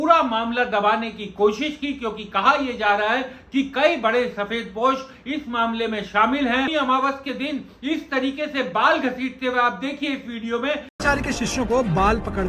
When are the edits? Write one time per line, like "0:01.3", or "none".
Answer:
0:06.7
0:10.9